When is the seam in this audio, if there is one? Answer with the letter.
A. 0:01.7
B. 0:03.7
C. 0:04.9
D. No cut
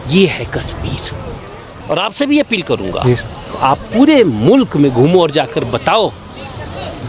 A